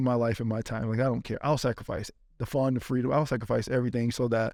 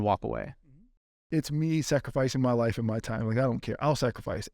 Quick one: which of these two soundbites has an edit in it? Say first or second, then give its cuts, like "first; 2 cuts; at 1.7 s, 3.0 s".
second; 1 cut; at 1.2 s